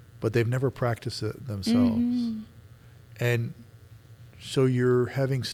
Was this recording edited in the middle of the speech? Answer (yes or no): no